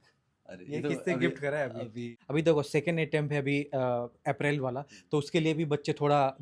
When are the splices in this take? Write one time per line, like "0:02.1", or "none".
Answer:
0:02.2

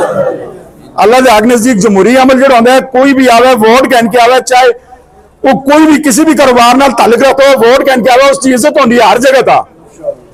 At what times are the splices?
none

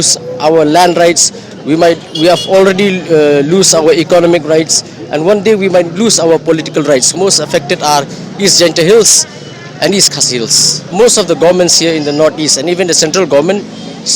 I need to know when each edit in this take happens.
0:07.1
0:10.9

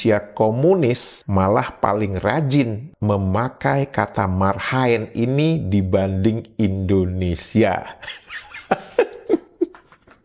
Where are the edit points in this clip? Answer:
none

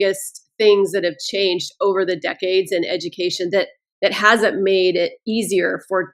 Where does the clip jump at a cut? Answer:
none

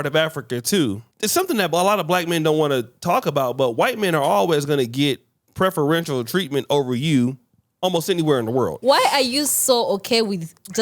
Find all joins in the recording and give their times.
0:01.1
0:08.8

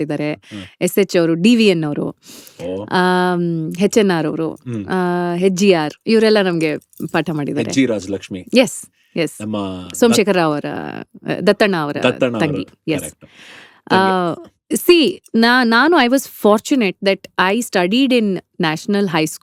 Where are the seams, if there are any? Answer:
none

